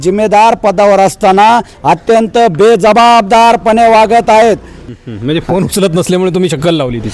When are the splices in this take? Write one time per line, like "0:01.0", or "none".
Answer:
0:04.7

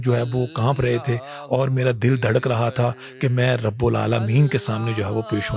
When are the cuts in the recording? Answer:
none

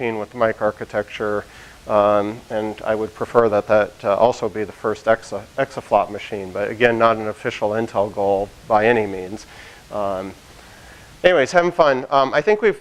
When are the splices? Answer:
0:08.4

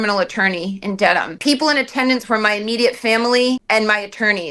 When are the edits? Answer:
0:01.3
0:03.6

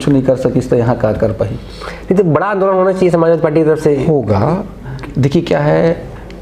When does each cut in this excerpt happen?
none

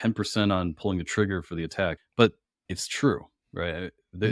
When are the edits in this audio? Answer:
0:02.0

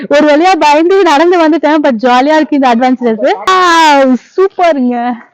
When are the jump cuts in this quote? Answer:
0:03.4

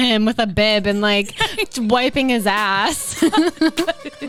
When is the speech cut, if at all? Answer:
none

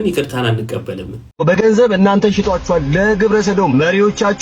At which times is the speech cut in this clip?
0:01.2

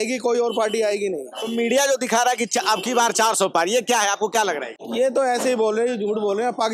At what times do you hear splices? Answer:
none

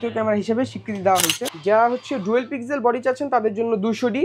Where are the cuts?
0:01.4

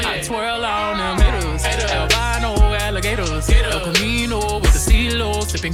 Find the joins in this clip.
none

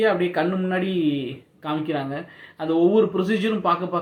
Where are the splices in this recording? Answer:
none

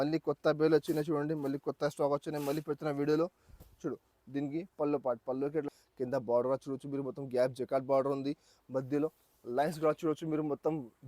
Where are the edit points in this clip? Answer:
0:05.6

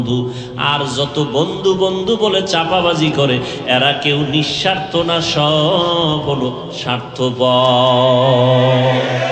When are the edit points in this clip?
none

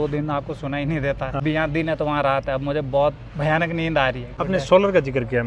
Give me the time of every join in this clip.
0:01.4
0:04.3

